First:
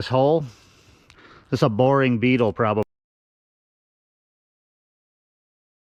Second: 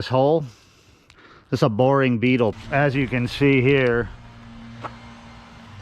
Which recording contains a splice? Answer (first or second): second